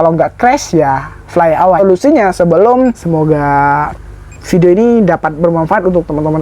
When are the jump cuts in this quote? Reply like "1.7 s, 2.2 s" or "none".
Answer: 1.8 s, 3.0 s